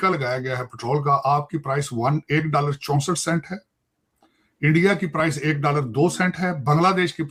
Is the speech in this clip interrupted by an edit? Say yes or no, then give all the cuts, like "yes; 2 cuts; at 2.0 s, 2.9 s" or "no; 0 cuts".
no; 0 cuts